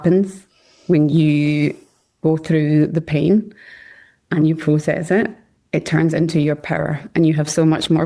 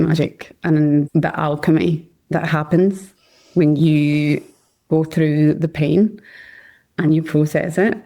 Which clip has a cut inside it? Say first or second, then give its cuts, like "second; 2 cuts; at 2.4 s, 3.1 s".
second; 1 cut; at 1.1 s